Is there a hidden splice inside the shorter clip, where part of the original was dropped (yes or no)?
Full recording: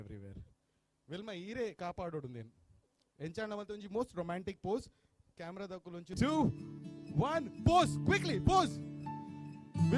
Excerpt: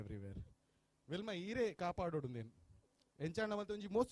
no